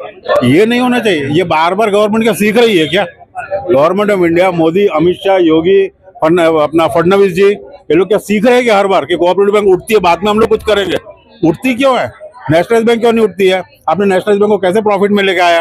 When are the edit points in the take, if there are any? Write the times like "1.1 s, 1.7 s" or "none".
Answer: none